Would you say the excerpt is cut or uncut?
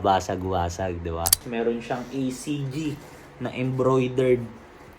cut